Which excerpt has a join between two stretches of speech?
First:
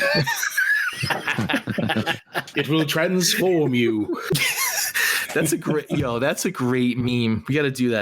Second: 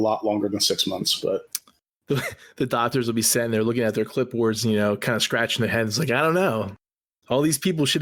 first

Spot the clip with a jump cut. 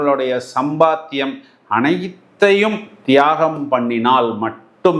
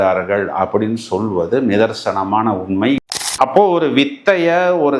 second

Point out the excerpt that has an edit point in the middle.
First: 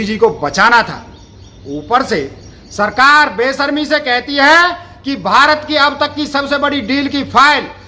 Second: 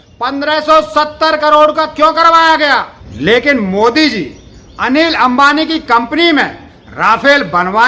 second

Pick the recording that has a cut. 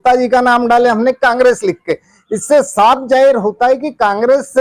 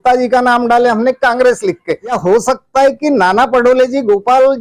second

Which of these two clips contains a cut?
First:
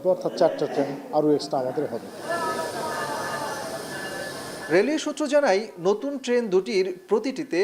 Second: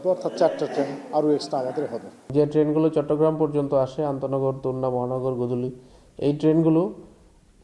second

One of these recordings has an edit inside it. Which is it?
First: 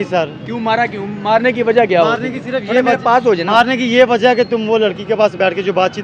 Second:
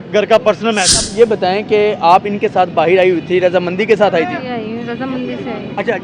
second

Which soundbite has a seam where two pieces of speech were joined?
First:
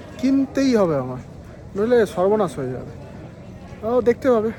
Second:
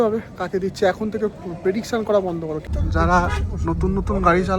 second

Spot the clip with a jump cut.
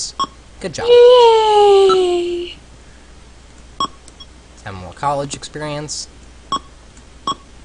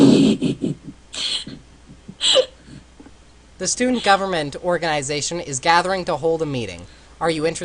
second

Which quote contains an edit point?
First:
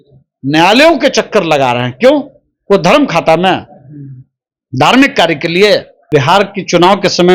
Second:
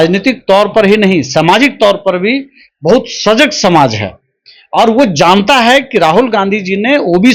first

